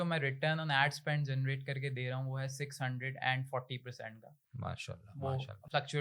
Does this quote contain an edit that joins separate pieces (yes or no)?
no